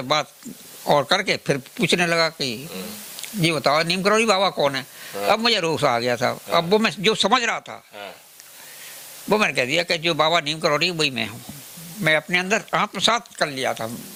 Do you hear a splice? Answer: no; 0 cuts

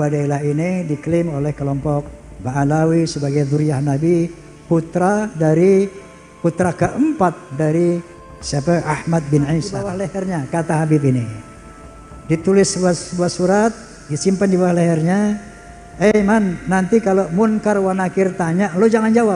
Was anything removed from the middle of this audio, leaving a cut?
yes; 1 cut; at 9.9 s

